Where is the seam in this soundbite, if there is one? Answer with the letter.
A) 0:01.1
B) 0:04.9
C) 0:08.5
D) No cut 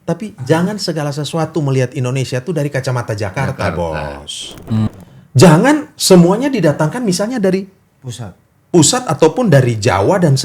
B